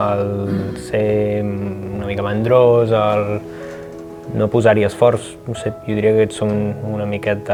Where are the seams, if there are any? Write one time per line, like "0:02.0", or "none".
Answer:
none

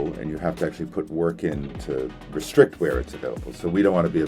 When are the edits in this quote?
0:02.2

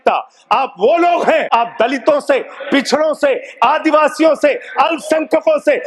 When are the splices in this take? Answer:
0:01.5

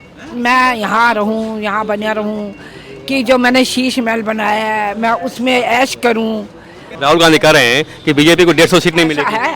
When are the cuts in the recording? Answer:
0:06.8

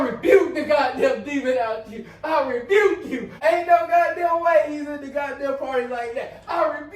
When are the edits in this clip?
0:03.3

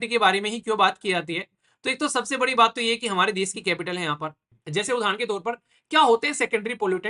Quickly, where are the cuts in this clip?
0:04.5

